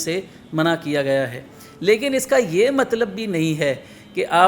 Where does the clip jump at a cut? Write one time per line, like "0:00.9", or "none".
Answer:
none